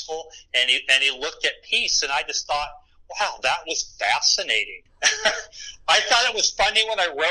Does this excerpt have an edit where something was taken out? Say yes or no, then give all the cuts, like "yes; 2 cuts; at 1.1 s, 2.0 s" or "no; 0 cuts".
yes; 1 cut; at 4.8 s